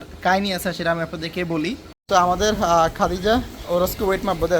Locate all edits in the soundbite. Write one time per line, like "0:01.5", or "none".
0:01.9